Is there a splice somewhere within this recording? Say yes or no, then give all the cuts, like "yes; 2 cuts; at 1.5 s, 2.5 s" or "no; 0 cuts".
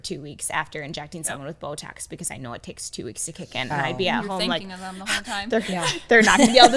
no; 0 cuts